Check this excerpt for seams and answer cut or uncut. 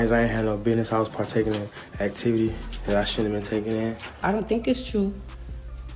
cut